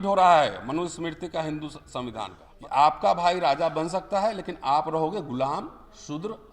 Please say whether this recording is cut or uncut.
cut